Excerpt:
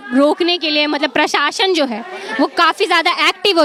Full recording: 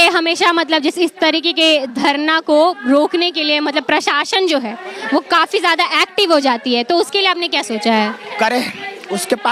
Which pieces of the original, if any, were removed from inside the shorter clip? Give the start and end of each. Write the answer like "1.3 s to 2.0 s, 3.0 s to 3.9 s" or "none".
none